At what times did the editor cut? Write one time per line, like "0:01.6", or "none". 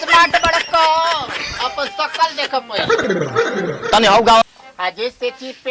0:04.4